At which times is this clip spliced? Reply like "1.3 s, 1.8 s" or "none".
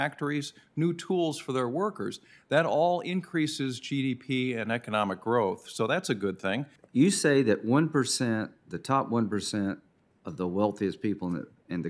6.7 s